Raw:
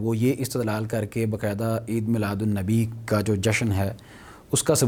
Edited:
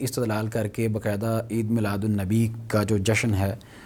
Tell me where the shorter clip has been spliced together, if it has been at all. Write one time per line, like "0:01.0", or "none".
none